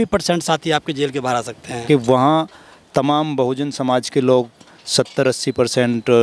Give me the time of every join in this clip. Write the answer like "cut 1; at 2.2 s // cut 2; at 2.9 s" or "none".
cut 1; at 1.8 s